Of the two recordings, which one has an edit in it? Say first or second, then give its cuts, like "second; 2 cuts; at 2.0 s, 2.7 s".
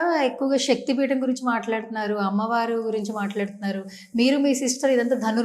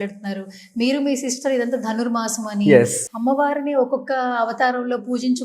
second; 1 cut; at 3.0 s